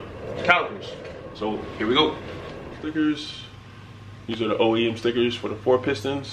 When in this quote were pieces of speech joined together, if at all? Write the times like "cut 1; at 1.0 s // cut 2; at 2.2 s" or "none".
cut 1; at 2.8 s